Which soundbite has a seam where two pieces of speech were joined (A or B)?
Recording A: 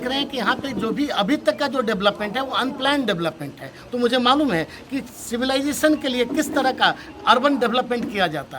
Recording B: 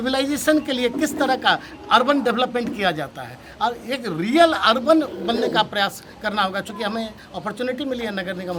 A